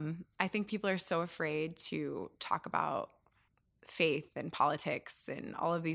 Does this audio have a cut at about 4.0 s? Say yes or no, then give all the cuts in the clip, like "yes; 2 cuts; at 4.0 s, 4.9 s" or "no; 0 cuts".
no; 0 cuts